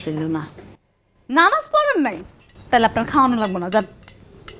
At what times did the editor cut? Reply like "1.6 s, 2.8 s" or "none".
none